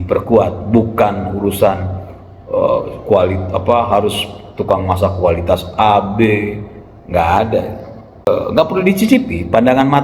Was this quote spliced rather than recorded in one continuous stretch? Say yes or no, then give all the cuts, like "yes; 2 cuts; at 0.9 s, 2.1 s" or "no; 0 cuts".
yes; 1 cut; at 8.3 s